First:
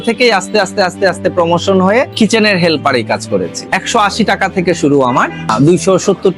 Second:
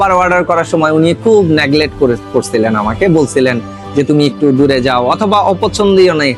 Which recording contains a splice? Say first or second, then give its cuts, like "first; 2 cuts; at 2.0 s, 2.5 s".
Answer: first; 2 cuts; at 3.6 s, 5.5 s